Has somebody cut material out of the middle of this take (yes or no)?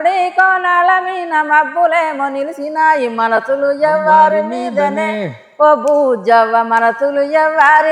no